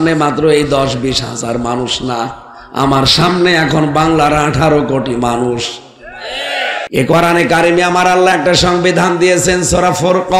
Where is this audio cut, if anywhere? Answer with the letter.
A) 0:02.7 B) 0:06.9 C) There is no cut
B